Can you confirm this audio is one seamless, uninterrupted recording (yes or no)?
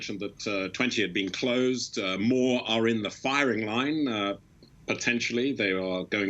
no